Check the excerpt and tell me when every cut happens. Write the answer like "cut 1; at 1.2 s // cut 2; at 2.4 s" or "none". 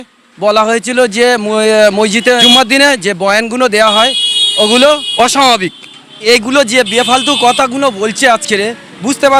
cut 1; at 2.4 s // cut 2; at 5.1 s // cut 3; at 6.3 s